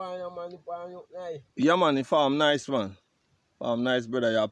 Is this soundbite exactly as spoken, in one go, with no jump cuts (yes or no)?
yes